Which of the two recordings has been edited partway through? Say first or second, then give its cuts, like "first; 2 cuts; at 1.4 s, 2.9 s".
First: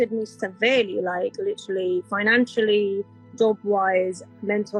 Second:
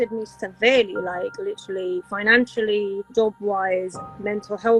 second; 1 cut; at 3.0 s